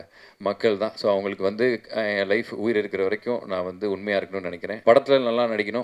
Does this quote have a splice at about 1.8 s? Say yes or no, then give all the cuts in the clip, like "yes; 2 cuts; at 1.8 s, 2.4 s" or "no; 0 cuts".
no; 1 cut; at 4.8 s